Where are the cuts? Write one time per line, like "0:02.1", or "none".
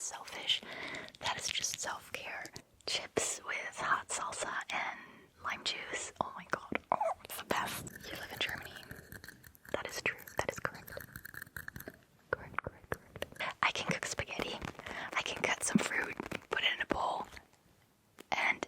0:02.6
0:07.9
0:13.3
0:14.8

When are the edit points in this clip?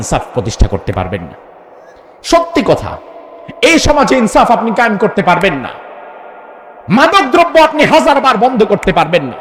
none

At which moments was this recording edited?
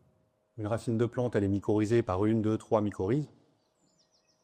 none

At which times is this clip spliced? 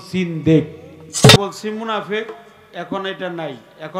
0:01.4

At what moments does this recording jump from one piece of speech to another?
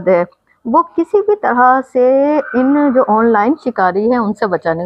none

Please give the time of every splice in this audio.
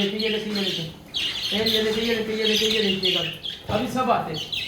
none

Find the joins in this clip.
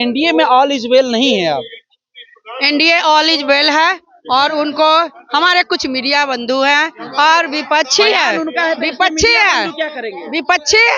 none

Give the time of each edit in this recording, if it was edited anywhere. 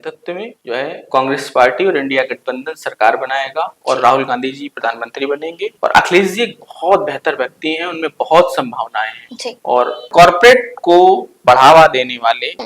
0:10.1

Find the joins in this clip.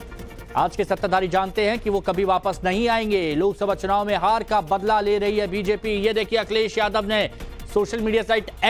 0:04.7

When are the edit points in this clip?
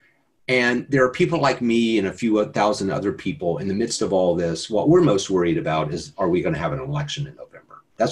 none

